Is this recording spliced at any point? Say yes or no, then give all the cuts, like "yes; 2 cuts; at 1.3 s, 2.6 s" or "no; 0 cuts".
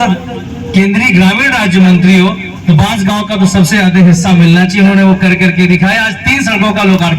no; 0 cuts